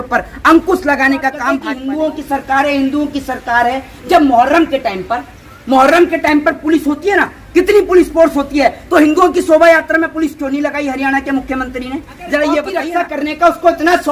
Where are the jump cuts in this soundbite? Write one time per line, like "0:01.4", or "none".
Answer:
0:01.7
0:12.8